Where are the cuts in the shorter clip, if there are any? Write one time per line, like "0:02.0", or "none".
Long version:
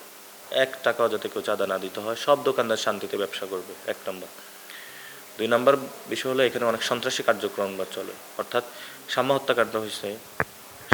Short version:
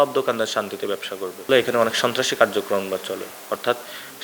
0:01.5